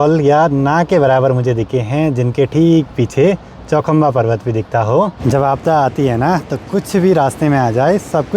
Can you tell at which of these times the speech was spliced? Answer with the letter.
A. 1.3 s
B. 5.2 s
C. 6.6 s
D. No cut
B